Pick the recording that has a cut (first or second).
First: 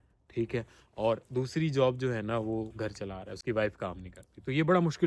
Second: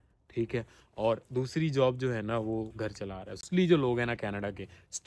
second